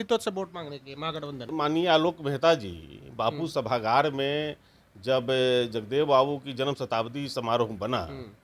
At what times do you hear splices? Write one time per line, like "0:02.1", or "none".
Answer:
0:01.5